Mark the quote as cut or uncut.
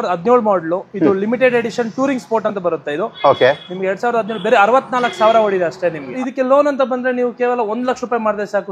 cut